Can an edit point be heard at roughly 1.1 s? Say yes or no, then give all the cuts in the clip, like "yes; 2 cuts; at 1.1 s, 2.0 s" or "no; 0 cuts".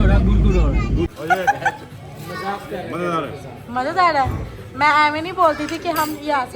yes; 1 cut; at 1.1 s